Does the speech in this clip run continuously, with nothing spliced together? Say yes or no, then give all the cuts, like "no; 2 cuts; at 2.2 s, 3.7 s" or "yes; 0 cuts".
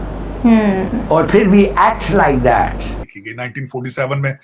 no; 1 cut; at 3.0 s